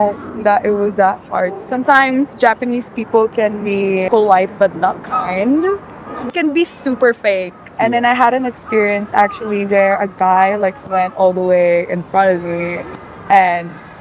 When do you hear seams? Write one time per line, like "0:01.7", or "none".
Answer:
0:01.6
0:04.0
0:06.3
0:07.7